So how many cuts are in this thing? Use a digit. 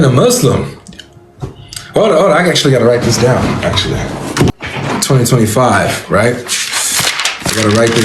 1